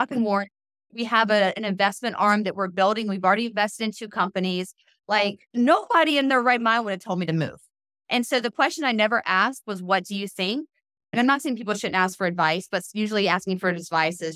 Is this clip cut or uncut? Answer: cut